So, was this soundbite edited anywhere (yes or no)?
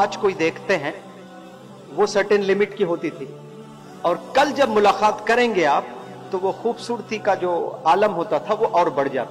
no